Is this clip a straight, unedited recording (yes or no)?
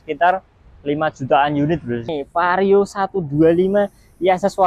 no